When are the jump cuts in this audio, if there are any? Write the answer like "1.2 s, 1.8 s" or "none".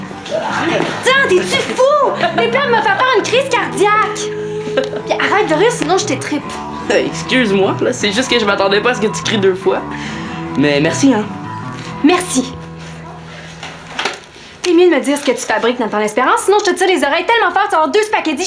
none